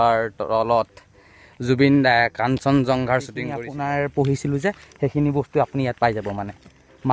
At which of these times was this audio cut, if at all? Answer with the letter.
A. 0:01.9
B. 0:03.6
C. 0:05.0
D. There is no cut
B